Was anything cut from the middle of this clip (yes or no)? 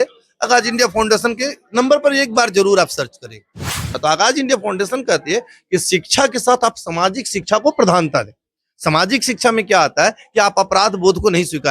yes